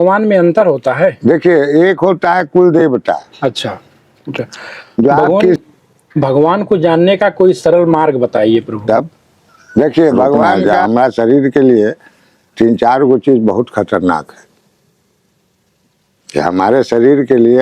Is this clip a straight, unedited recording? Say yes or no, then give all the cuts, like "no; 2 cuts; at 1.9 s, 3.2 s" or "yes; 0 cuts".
no; 2 cuts; at 5.6 s, 10.6 s